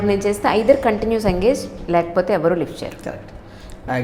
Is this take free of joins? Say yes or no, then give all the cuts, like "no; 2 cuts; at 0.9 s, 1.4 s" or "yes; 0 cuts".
yes; 0 cuts